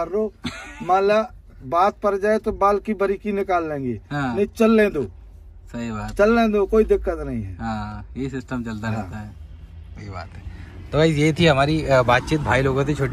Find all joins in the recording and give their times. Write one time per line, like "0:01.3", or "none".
none